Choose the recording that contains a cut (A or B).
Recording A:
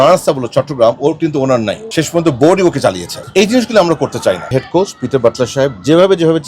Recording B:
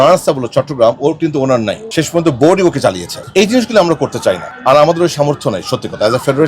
A